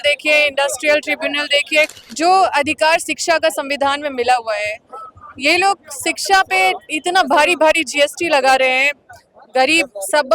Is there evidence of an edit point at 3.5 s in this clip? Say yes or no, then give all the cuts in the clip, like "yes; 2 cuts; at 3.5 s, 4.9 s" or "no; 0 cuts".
no; 1 cut; at 1.9 s